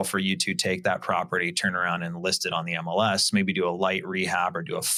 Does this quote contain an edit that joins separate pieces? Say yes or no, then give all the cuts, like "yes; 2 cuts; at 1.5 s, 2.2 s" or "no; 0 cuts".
no; 0 cuts